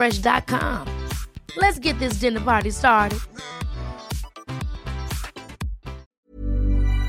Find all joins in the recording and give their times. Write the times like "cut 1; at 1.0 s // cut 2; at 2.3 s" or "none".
cut 1; at 6.2 s